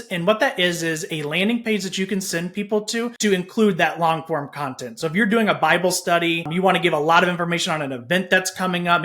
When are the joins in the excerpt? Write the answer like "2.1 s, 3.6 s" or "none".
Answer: 3.1 s, 6.5 s